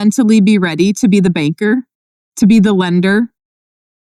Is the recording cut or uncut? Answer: uncut